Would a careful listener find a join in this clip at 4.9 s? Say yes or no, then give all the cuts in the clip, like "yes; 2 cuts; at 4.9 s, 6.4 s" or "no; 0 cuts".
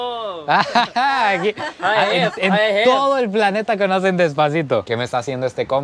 yes; 1 cut; at 4.9 s